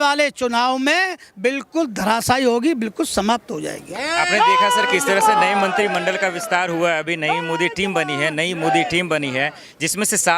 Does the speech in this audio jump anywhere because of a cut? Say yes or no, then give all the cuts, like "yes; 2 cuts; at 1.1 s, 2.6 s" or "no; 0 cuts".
no; 0 cuts